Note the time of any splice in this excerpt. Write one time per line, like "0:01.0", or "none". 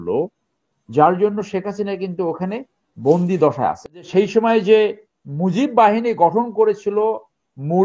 0:03.9